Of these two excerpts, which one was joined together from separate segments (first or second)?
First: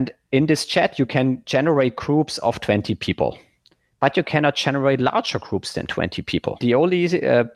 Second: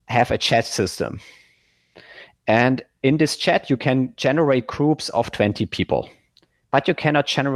first